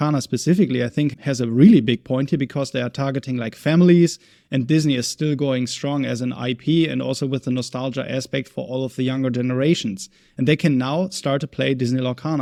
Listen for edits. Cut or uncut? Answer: uncut